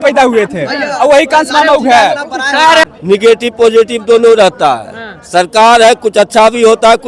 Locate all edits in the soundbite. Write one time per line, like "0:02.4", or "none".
0:02.8